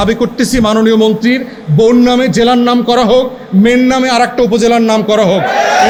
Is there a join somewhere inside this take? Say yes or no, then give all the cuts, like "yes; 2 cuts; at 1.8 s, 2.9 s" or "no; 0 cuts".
no; 0 cuts